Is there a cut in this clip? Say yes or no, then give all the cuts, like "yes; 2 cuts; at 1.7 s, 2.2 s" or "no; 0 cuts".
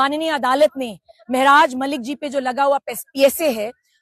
no; 0 cuts